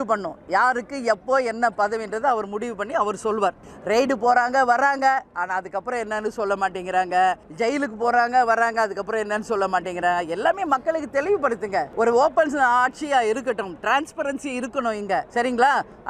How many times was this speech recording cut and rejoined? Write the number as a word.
four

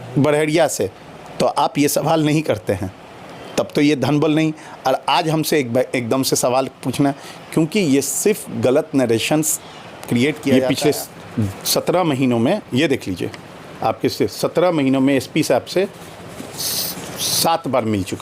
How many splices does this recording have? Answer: one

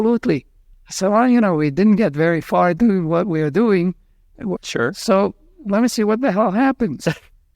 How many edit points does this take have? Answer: two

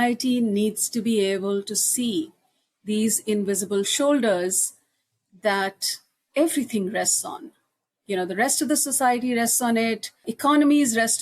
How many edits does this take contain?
one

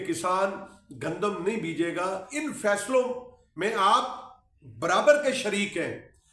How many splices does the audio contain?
one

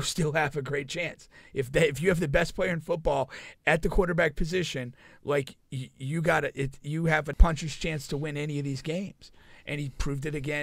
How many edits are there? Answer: one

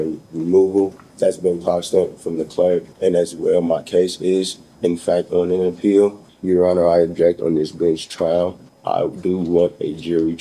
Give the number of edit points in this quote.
four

